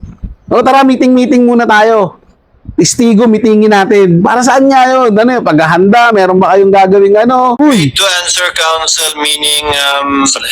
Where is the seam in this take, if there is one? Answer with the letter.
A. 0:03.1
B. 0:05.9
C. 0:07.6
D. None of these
C